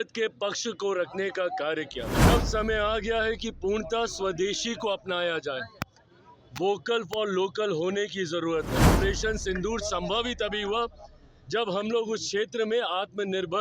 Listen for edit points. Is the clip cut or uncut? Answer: cut